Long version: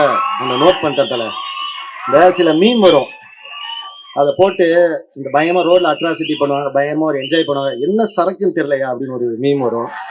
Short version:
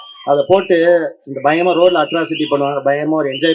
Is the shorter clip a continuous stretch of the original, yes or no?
yes